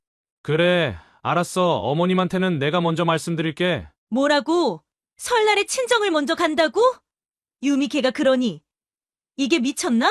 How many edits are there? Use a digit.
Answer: 1